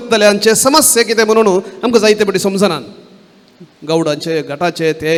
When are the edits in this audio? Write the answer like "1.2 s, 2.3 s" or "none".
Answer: none